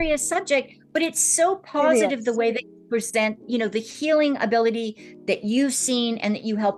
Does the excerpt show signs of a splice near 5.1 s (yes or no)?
no